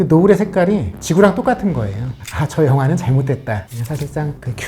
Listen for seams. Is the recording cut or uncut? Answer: cut